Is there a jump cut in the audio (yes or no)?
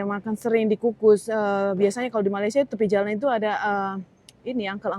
no